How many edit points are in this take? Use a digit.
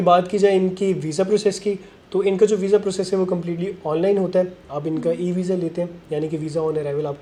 0